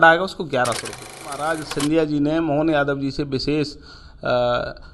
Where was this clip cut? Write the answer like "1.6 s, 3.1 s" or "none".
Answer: 1.2 s